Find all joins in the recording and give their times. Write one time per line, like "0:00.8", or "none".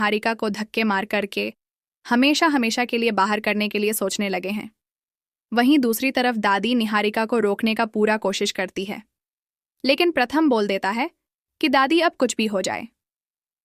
none